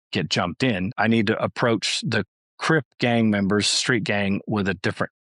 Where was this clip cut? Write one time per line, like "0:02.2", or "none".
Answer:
0:00.9